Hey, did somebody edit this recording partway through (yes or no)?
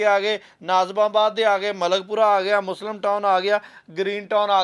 no